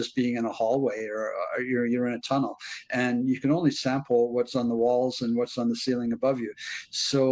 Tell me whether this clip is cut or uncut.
uncut